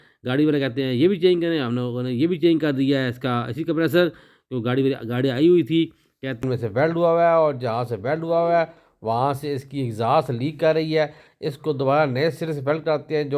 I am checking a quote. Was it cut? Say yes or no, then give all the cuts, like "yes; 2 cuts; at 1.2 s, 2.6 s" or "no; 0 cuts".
yes; 1 cut; at 6.4 s